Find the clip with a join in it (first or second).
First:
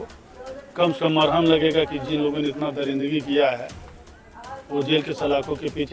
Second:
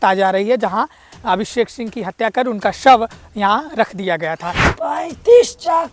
second